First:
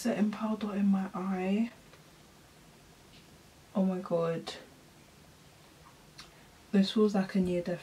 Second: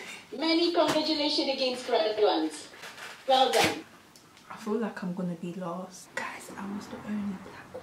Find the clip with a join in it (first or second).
second